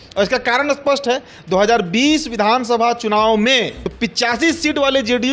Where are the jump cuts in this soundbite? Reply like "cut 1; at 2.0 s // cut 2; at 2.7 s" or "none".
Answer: cut 1; at 3.8 s